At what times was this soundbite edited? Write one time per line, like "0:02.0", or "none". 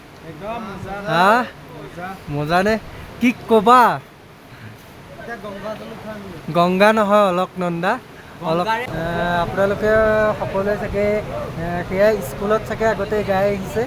0:08.9